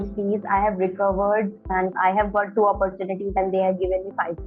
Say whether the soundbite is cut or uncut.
cut